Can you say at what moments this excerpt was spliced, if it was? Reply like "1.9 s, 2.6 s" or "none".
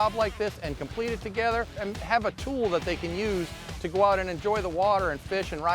1.8 s